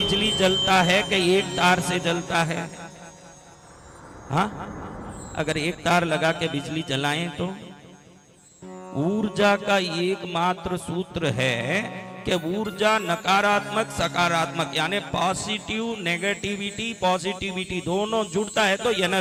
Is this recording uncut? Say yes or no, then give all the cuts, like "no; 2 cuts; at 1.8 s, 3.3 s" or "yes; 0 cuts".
yes; 0 cuts